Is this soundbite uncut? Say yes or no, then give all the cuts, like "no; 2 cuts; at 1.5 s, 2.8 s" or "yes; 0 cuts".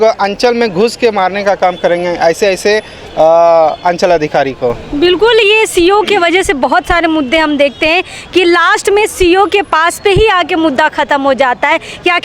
yes; 0 cuts